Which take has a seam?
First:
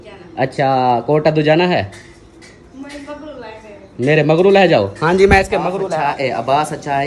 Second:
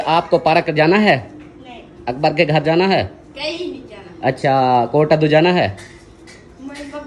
first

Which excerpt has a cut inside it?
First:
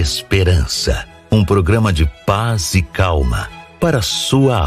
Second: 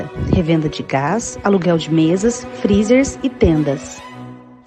first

